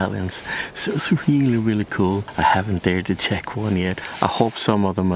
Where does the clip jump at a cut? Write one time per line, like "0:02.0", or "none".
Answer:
0:02.3